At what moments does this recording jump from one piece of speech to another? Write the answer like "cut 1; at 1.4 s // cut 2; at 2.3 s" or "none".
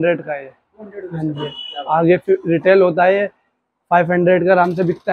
none